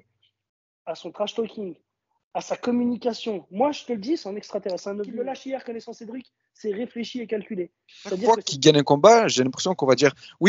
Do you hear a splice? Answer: yes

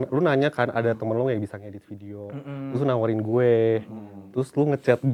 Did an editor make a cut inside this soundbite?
no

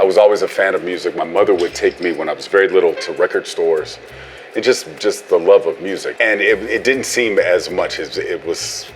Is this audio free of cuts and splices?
no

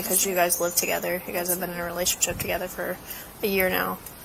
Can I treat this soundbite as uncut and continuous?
yes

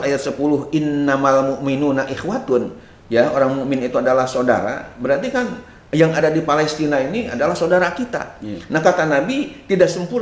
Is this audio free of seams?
yes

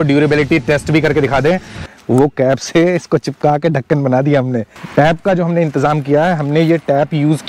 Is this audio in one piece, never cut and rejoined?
no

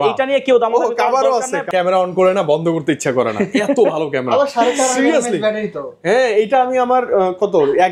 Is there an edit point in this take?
yes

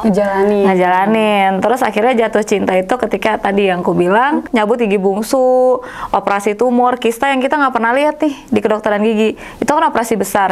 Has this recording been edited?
yes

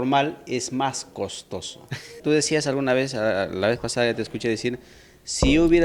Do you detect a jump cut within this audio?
no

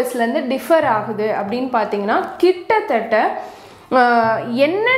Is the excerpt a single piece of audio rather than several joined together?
yes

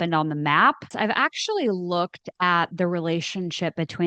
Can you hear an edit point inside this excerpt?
yes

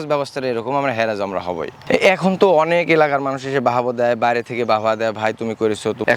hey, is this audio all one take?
yes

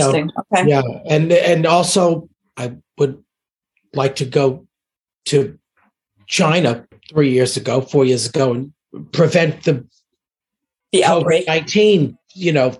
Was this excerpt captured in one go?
yes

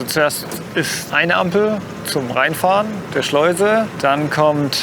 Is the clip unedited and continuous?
no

